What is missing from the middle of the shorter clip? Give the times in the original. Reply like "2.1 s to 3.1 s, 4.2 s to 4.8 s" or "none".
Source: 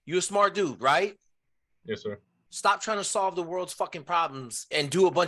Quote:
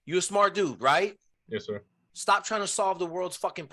1.3 s to 1.7 s